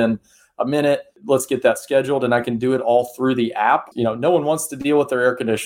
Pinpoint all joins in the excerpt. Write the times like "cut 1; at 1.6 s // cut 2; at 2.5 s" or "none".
cut 1; at 1.2 s // cut 2; at 3.9 s

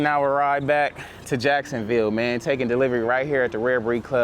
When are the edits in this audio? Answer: none

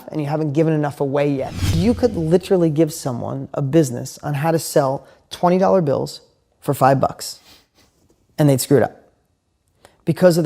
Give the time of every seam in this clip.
cut 1; at 1.7 s

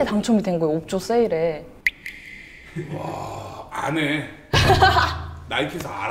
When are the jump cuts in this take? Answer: none

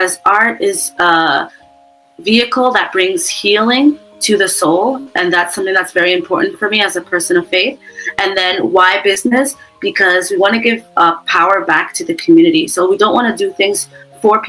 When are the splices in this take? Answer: none

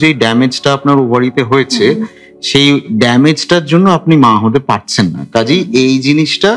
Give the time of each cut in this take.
none

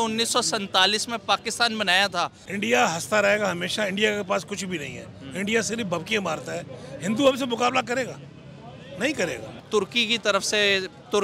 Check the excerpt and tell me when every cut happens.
cut 1; at 2.4 s // cut 2; at 9.6 s

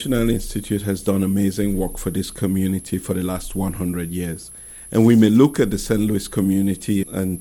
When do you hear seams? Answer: none

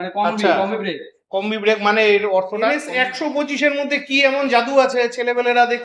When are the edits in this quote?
cut 1; at 2.8 s

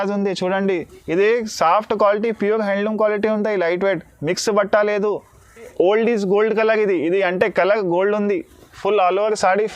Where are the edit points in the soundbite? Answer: cut 1; at 5.7 s

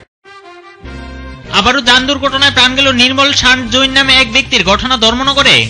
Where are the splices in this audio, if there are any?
cut 1; at 1.2 s

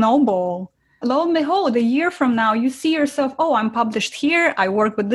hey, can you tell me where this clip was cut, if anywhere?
none

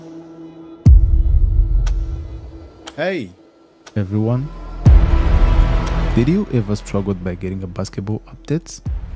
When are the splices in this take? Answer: none

